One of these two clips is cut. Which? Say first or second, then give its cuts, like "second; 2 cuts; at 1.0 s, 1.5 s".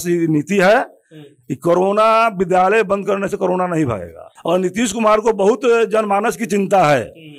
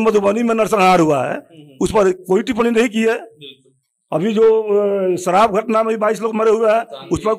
first; 1 cut; at 4.3 s